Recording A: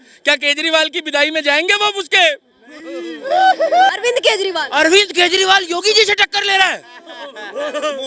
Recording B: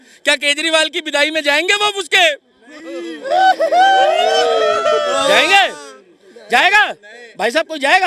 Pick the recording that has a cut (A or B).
A